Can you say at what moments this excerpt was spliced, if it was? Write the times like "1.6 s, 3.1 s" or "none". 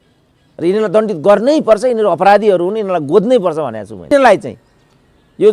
4.1 s